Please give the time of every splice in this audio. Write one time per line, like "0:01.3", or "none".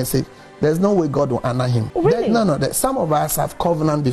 0:01.8